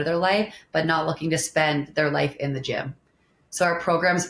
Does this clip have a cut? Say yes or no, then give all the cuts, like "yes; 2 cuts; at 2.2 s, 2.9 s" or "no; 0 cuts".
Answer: no; 0 cuts